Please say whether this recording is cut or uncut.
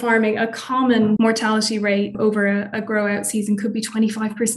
cut